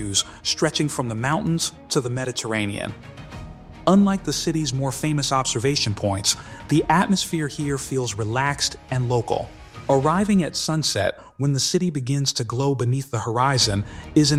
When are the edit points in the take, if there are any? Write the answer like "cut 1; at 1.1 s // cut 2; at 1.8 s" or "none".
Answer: none